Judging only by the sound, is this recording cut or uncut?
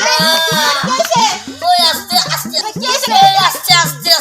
cut